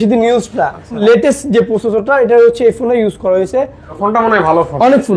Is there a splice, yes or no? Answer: yes